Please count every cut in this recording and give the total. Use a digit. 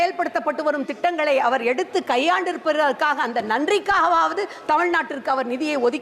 0